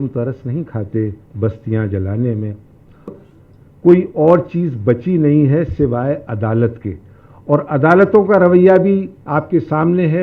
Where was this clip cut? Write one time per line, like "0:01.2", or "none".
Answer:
0:03.1